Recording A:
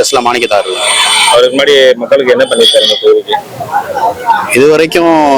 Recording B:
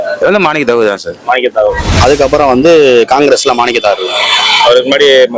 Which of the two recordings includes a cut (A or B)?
B